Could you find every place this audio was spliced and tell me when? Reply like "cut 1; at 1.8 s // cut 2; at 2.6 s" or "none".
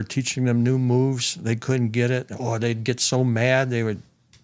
none